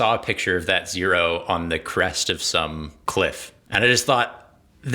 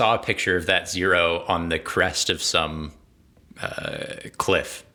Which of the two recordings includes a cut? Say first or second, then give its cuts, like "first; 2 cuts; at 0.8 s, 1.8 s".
first; 2 cuts; at 2.9 s, 3.5 s